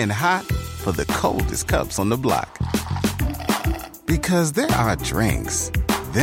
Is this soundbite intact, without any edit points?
yes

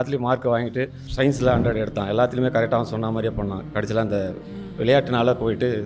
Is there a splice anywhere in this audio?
yes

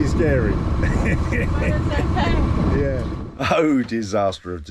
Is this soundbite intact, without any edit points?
no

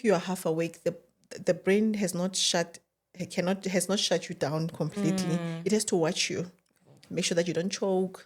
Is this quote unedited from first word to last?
yes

